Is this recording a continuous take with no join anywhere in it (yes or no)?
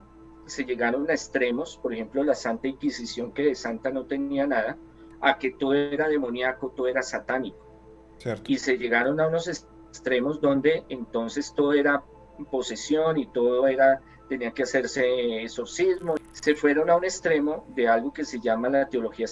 no